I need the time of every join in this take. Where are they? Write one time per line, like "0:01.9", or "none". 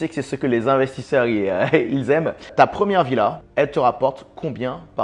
0:02.5
0:03.4